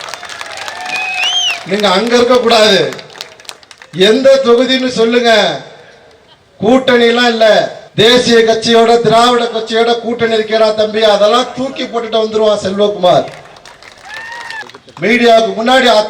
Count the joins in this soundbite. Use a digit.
2